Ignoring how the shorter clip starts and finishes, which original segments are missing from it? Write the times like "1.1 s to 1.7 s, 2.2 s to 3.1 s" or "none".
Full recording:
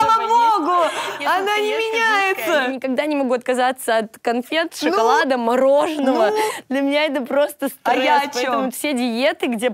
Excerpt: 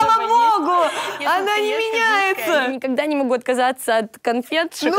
none